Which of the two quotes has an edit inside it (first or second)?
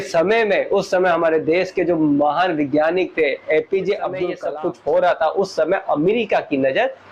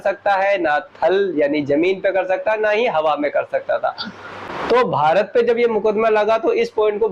first